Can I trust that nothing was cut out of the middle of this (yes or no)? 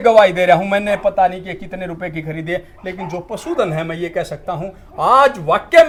yes